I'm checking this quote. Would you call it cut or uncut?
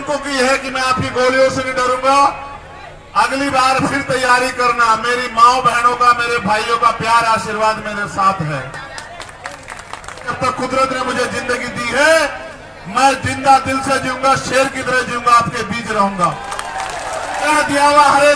cut